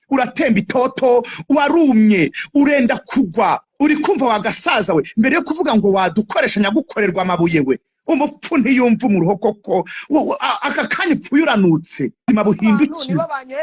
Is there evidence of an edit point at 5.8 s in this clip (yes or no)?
no